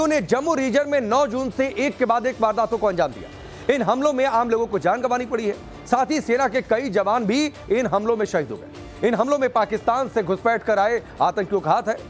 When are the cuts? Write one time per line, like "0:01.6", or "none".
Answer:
0:10.9